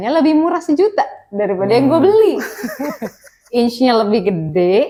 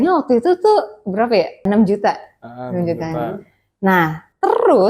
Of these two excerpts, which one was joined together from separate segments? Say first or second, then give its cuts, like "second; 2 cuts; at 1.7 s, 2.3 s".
second; 1 cut; at 1.6 s